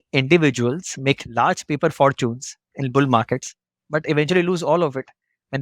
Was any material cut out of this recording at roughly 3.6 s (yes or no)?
no